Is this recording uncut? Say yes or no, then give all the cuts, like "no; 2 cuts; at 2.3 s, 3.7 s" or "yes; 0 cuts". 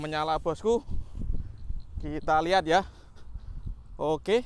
yes; 0 cuts